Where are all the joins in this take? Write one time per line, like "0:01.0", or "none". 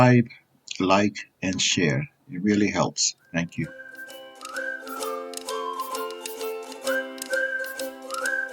0:03.9